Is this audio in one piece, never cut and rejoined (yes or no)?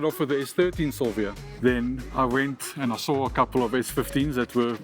no